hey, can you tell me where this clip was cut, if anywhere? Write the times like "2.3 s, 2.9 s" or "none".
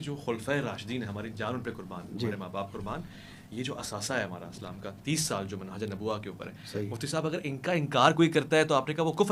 none